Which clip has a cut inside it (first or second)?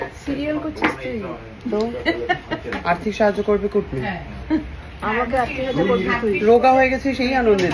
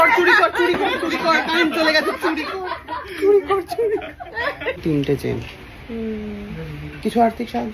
second